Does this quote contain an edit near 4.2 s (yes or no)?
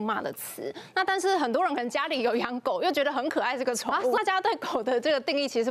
yes